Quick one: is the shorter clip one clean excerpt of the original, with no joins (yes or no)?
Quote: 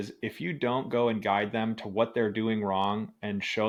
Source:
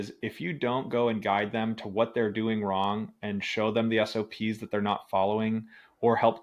yes